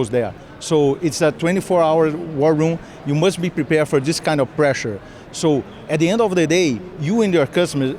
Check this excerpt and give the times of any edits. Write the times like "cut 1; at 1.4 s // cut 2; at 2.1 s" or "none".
none